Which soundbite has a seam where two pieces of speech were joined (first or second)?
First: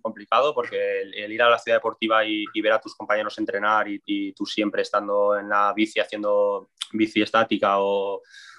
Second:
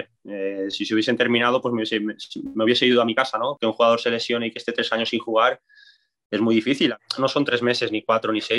second